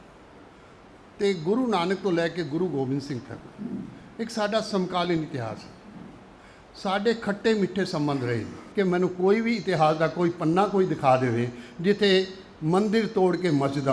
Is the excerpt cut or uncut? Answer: cut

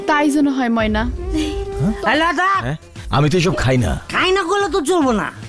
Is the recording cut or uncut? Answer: cut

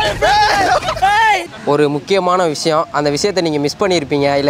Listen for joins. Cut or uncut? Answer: cut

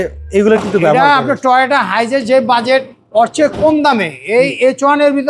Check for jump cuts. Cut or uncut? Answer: uncut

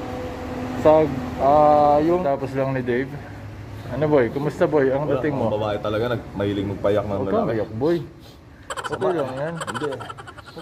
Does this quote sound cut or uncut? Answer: cut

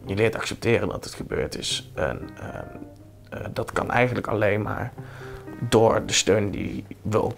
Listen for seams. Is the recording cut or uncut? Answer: uncut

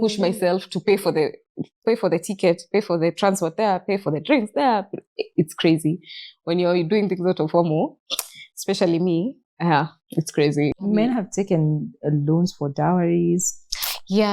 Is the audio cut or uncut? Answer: cut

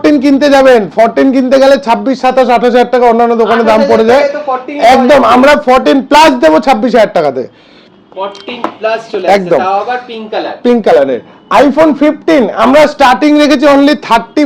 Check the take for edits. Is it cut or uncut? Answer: uncut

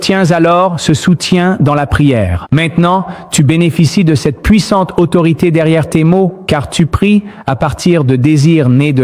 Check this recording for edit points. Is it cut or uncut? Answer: uncut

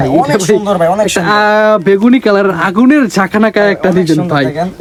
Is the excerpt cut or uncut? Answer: uncut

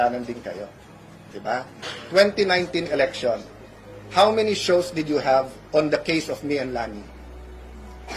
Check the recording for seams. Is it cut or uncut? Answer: cut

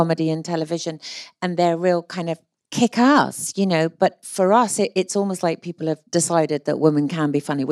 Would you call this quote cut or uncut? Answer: cut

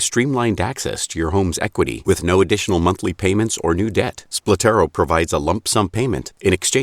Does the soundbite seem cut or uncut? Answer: cut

